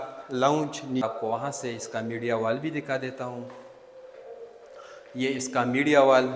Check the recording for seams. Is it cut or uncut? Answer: cut